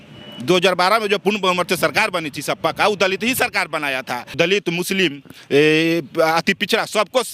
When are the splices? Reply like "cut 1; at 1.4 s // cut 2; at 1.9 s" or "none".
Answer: cut 1; at 4.4 s

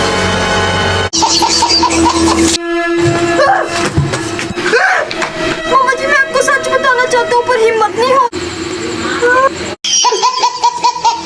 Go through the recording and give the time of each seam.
cut 1; at 1.1 s // cut 2; at 8.3 s

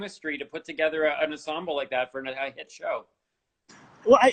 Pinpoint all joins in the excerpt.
none

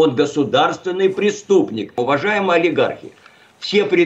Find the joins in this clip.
cut 1; at 2.0 s

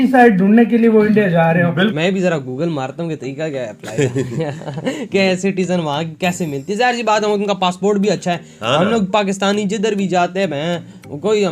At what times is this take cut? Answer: cut 1; at 1.9 s

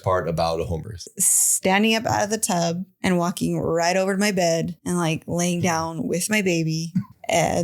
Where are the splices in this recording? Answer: cut 1; at 1.0 s

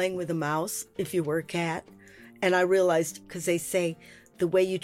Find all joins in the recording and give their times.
cut 1; at 3.1 s

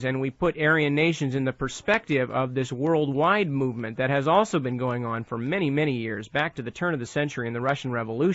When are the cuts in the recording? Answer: cut 1; at 4.7 s

